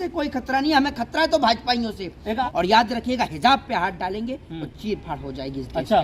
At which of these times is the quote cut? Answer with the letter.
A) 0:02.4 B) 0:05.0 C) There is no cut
A